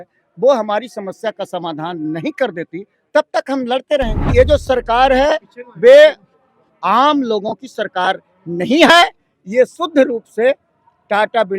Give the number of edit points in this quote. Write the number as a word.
one